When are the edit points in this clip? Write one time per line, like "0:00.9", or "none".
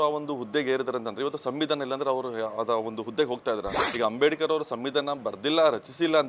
0:03.8